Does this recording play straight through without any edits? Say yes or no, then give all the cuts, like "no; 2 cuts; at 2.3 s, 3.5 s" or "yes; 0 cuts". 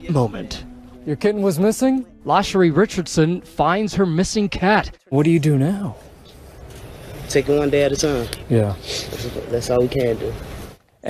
no; 1 cut; at 3.0 s